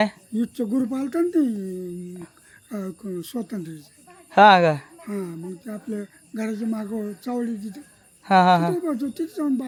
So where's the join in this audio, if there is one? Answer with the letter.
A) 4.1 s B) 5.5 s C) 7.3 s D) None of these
D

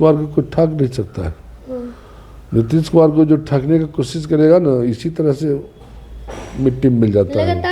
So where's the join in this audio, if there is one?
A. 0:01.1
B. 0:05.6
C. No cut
C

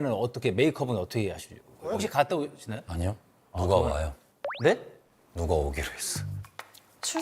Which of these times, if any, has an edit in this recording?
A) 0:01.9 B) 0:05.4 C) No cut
A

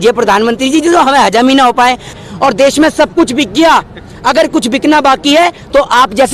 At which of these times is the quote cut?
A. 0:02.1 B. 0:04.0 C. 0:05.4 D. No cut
A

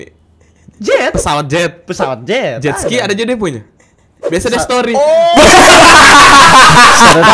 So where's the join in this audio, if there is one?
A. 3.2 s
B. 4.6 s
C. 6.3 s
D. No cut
D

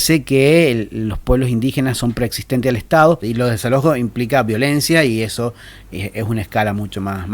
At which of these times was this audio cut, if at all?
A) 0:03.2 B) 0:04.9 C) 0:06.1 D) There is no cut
A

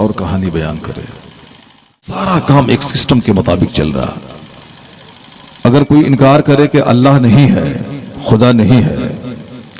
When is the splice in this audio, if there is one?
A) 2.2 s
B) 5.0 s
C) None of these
A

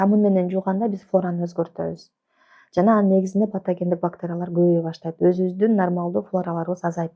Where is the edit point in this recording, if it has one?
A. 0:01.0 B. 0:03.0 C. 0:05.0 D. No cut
D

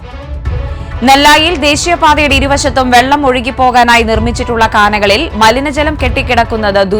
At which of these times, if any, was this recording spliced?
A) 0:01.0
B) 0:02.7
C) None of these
A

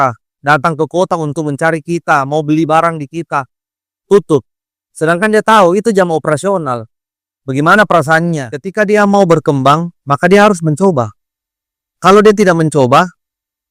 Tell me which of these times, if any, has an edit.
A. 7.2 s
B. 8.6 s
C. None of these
B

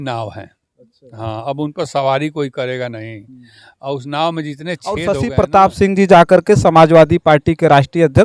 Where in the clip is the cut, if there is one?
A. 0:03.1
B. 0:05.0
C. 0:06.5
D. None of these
B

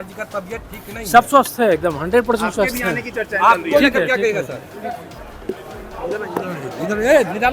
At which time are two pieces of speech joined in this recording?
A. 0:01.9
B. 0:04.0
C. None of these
C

